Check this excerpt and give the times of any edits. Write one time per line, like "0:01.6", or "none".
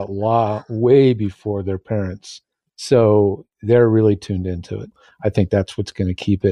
0:04.9